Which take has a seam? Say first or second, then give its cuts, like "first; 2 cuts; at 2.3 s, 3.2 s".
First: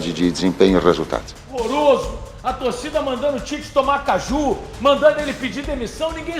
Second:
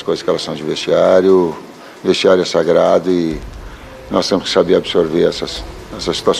first; 1 cut; at 1.6 s